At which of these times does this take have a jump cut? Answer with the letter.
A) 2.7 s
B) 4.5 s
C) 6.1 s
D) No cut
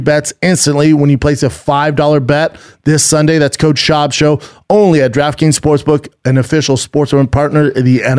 D